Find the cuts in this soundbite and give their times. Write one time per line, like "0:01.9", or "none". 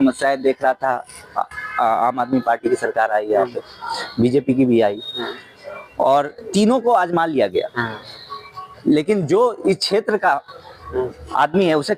none